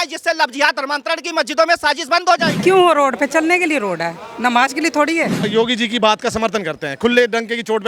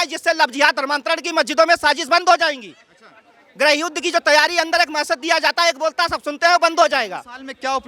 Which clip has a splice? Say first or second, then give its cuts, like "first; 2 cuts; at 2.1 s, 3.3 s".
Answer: first; 2 cuts; at 2.5 s, 5.4 s